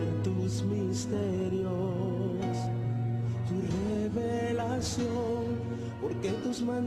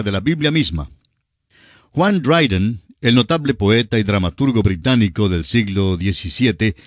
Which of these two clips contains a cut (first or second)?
second